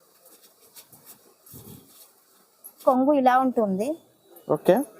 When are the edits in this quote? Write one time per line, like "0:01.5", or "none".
0:02.7